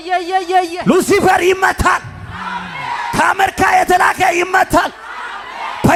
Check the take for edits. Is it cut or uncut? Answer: uncut